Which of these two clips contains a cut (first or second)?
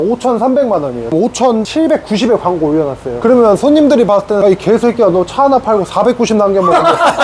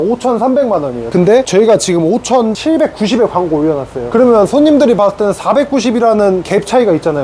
first